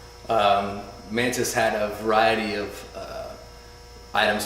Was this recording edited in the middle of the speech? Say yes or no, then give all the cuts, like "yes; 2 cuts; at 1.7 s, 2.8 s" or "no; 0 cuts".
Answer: yes; 1 cut; at 2.1 s